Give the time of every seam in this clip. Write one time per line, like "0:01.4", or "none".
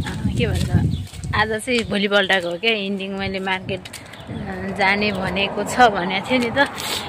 none